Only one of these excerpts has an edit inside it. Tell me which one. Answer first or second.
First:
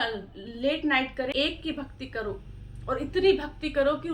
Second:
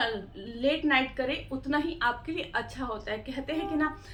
first